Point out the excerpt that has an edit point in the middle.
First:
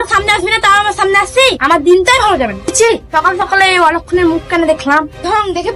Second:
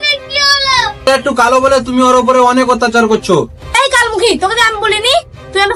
second; 2 cuts; at 1.1 s, 3.8 s

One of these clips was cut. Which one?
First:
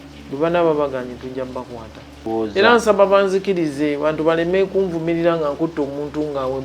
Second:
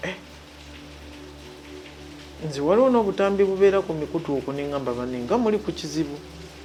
first; 1 cut; at 2.3 s

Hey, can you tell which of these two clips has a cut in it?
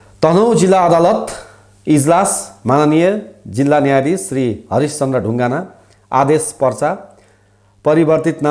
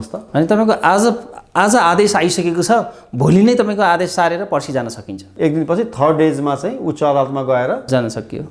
second; 1 cut; at 5.3 s

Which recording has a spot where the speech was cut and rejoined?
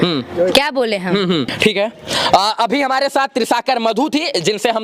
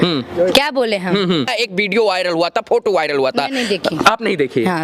second; 1 cut; at 1.5 s

